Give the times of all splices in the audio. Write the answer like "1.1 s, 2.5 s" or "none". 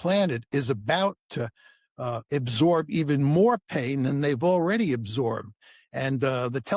none

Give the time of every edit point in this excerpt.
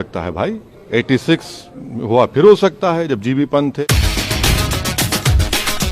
3.8 s

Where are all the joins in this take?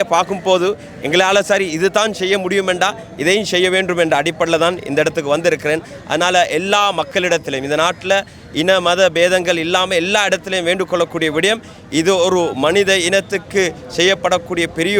none

